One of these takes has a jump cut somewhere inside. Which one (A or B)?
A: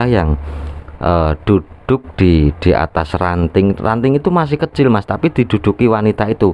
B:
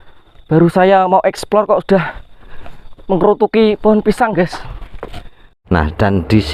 B